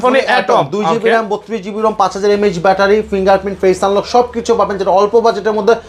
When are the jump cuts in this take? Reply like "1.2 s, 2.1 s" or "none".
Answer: none